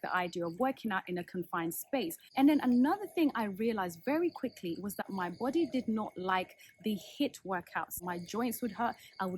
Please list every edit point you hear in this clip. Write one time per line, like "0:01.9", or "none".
0:02.2
0:08.0